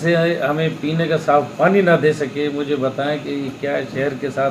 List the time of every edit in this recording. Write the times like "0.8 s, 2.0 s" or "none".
none

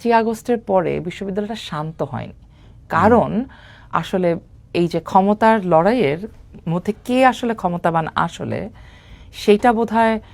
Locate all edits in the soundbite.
none

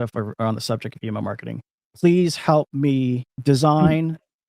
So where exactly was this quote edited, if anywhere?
3.3 s

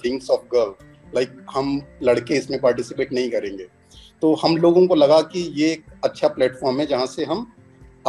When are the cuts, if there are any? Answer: none

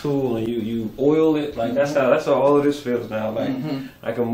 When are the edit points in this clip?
none

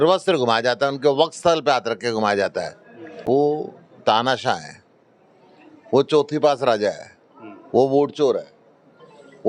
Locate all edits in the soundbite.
3.2 s

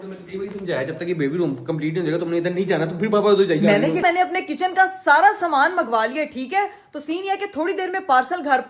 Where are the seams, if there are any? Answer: 4.0 s

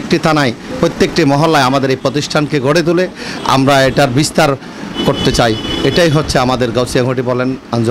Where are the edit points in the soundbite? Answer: none

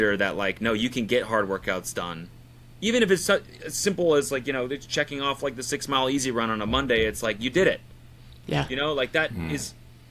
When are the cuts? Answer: none

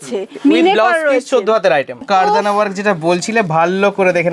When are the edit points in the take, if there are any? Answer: 2.0 s

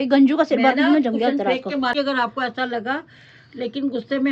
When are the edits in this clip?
2.0 s

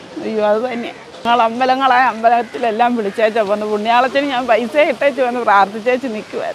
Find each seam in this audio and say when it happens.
none

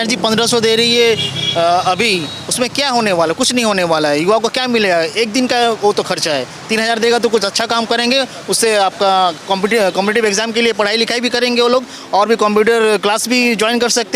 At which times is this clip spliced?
none

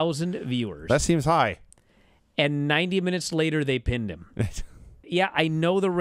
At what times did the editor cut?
5.0 s

